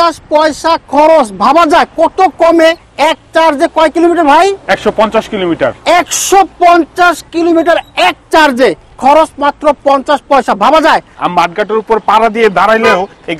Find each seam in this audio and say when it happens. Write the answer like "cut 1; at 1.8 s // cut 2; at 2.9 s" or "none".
cut 1; at 2.9 s // cut 2; at 11.2 s